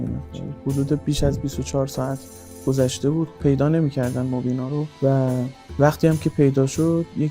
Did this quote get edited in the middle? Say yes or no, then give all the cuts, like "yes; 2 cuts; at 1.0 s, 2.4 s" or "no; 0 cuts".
yes; 2 cuts; at 4.9 s, 5.8 s